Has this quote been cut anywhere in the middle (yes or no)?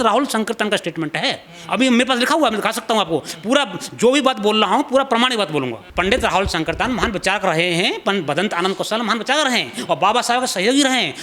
yes